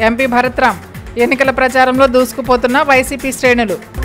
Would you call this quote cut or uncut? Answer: uncut